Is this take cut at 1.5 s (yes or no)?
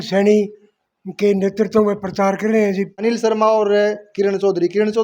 no